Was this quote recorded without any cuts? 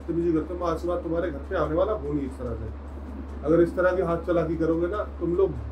yes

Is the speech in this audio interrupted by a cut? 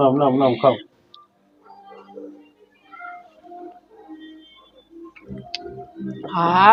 no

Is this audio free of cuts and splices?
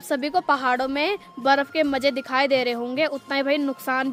yes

